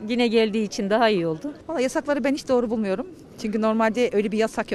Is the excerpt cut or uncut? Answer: cut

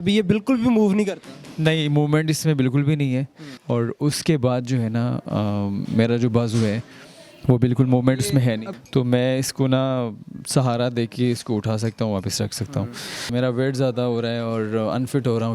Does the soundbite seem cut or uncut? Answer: cut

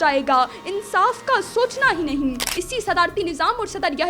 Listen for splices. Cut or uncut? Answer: cut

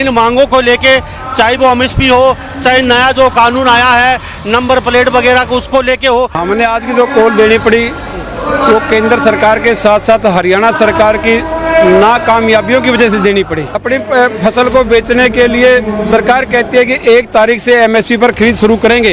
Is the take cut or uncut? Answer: cut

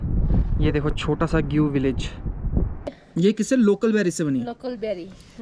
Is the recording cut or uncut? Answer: cut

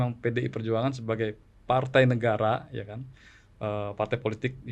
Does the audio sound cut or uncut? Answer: uncut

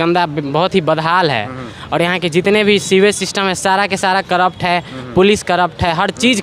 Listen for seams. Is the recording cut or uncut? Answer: uncut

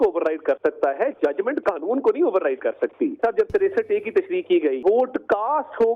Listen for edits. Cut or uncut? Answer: cut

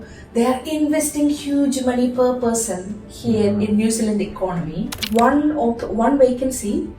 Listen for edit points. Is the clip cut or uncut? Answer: cut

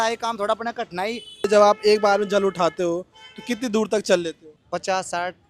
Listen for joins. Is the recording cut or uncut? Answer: cut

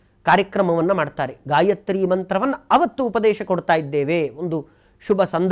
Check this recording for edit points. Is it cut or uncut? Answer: uncut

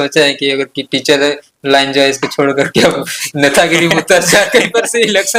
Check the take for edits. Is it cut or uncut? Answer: uncut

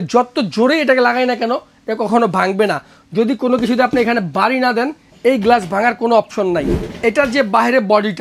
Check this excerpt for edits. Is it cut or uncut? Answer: cut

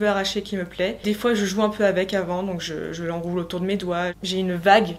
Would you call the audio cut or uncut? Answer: cut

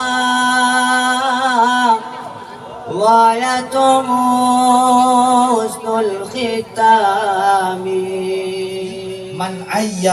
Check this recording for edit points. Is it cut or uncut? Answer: cut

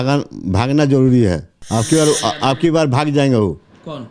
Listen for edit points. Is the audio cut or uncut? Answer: cut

